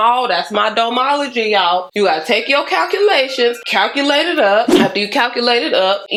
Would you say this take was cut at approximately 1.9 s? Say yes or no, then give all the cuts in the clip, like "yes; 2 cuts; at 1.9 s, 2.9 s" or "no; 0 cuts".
no; 0 cuts